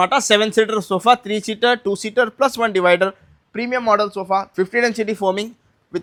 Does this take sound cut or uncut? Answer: uncut